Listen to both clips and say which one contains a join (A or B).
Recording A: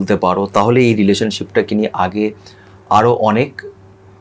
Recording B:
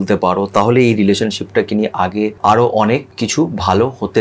B